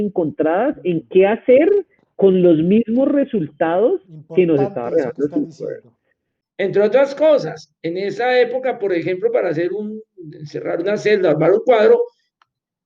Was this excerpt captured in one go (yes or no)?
no